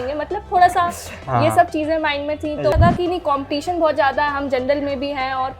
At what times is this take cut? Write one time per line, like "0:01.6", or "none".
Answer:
0:02.7